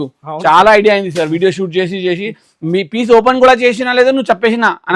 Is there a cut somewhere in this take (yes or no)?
no